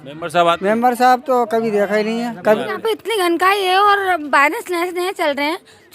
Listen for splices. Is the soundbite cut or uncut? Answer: cut